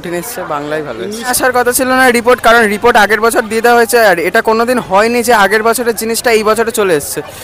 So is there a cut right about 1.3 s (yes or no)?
yes